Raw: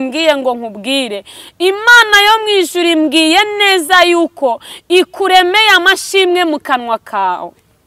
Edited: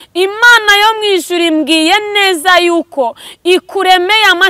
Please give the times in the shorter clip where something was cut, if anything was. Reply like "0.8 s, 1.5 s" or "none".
none